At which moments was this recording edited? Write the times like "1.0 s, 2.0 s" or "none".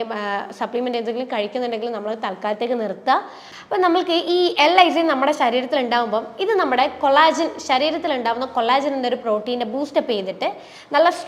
3.4 s